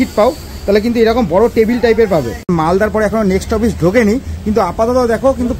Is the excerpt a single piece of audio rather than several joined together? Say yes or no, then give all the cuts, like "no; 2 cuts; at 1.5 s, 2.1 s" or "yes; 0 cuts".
no; 1 cut; at 2.5 s